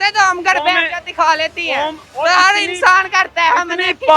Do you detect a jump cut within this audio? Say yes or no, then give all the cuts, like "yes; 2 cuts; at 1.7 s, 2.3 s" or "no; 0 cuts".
yes; 1 cut; at 2.0 s